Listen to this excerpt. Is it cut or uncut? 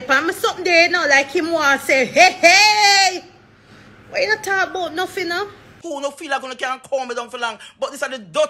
cut